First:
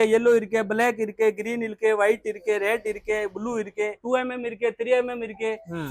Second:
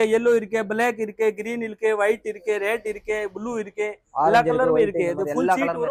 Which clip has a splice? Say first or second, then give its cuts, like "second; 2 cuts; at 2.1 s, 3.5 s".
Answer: first; 1 cut; at 4.0 s